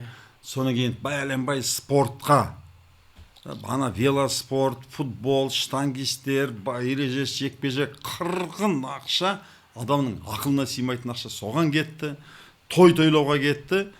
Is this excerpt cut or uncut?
uncut